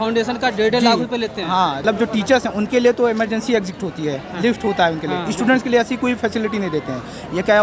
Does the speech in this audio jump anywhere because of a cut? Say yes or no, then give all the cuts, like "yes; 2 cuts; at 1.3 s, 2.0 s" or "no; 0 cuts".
yes; 1 cut; at 1.8 s